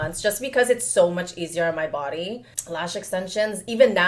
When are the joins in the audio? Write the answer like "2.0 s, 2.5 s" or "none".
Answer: 2.5 s